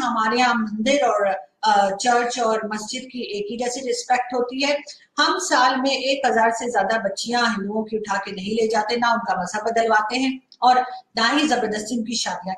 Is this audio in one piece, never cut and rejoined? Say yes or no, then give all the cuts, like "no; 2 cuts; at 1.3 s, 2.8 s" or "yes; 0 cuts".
yes; 0 cuts